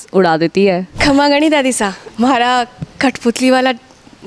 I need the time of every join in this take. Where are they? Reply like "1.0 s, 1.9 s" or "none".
0.9 s, 2.0 s